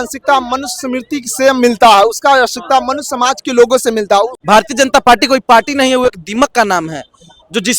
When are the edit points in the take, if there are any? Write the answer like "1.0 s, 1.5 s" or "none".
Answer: 4.4 s